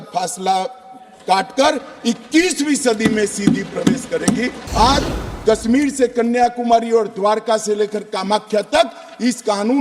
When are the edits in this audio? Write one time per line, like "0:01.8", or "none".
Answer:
0:04.6